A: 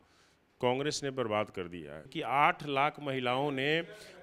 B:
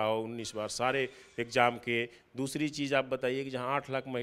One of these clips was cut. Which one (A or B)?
A